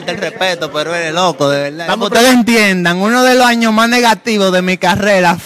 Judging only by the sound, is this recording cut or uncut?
cut